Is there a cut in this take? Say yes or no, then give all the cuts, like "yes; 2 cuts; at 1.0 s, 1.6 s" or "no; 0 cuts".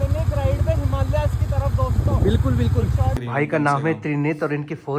yes; 1 cut; at 3.2 s